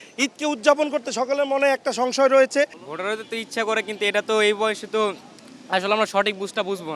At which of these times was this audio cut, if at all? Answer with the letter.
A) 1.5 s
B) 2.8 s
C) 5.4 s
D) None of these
B